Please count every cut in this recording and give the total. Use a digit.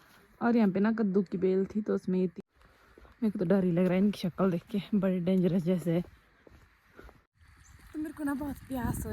2